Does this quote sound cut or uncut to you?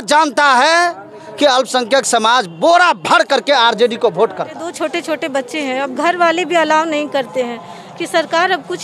cut